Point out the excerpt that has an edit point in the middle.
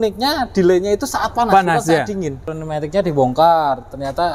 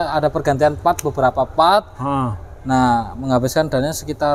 first; 1 cut; at 2.6 s

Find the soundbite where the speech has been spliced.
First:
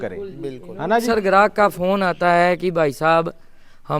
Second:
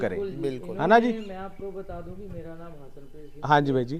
first; 1 cut; at 1.0 s

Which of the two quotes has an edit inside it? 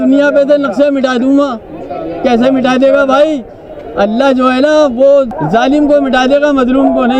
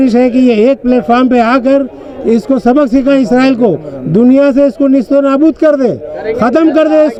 first; 1 cut; at 5.3 s

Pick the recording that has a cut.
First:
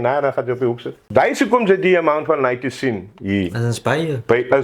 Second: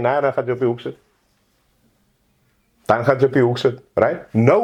first; 1 cut; at 0.9 s

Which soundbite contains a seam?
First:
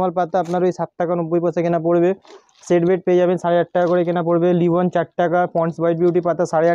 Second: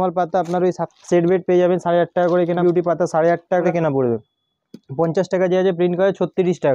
second; 3 cuts; at 0.9 s, 2.6 s, 3.7 s

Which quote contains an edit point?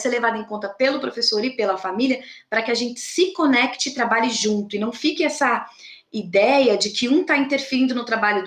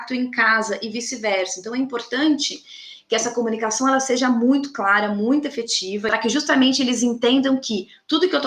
second; 1 cut; at 6.0 s

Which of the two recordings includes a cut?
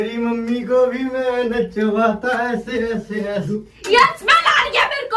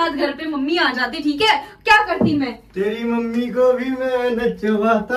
first; 1 cut; at 3.5 s

